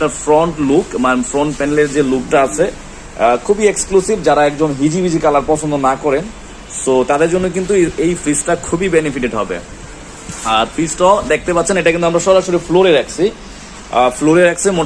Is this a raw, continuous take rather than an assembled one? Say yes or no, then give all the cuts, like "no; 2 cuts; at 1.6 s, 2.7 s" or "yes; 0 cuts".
yes; 0 cuts